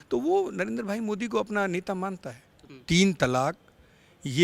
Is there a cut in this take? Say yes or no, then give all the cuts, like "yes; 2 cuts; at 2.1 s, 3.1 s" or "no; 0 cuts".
yes; 1 cut; at 2.7 s